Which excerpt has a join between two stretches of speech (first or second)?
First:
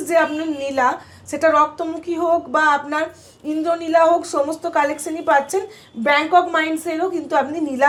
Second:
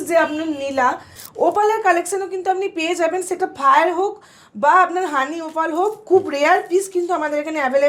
second